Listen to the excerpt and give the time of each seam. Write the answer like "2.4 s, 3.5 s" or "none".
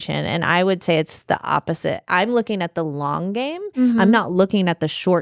2.0 s